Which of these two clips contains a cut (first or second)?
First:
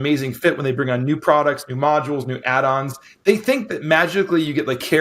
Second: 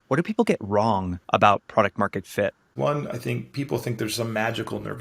second